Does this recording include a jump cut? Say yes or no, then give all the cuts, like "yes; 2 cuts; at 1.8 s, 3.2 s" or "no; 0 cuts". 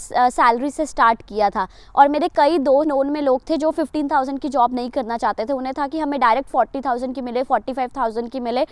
no; 0 cuts